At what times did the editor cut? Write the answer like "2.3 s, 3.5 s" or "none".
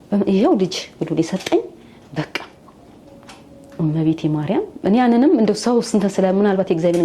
none